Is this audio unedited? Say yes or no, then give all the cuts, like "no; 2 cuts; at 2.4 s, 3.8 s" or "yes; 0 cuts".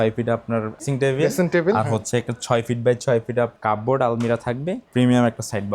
no; 3 cuts; at 0.9 s, 3.5 s, 4.8 s